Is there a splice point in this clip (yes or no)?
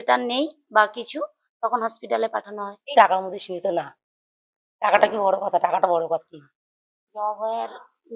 yes